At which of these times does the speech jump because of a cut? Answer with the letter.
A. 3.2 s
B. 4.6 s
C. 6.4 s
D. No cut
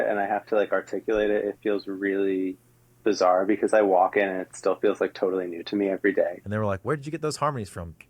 C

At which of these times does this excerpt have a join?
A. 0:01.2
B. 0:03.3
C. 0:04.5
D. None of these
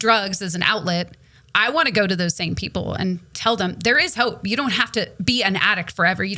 D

